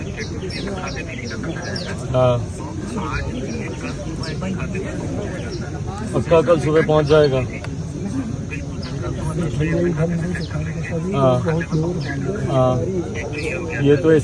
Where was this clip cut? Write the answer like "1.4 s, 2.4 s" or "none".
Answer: none